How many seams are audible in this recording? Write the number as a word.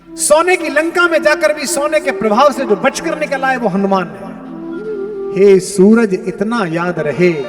one